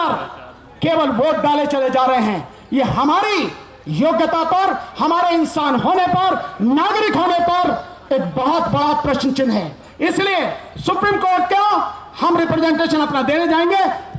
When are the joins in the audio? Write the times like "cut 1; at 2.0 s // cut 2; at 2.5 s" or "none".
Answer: none